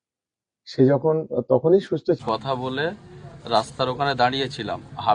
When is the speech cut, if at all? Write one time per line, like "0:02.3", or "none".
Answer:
0:02.2